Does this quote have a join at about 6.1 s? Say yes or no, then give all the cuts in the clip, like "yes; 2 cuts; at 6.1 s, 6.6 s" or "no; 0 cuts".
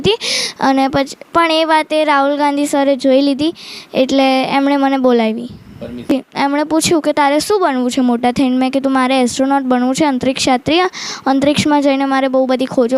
yes; 1 cut; at 6.1 s